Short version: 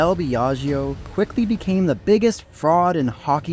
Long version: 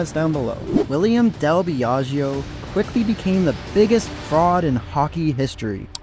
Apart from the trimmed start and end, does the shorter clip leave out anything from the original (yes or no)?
yes